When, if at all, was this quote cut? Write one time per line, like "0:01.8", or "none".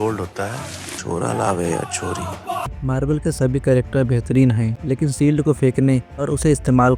0:02.7
0:04.7